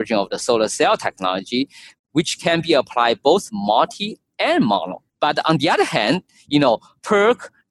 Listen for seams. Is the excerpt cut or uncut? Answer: cut